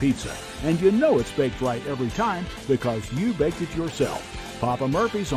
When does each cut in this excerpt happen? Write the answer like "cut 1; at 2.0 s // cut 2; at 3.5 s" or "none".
none